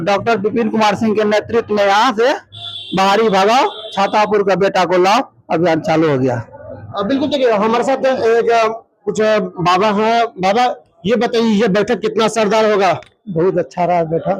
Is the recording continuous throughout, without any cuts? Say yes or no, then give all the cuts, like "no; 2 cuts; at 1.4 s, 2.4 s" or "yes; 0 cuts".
yes; 0 cuts